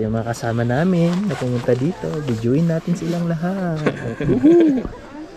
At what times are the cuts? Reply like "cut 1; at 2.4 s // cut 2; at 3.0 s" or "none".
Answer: none